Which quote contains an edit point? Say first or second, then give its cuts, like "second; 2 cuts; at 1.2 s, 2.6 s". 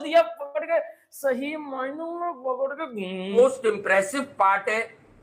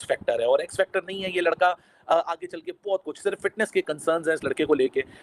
first; 1 cut; at 3.4 s